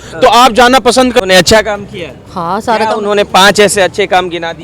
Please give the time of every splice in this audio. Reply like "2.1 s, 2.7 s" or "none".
1.2 s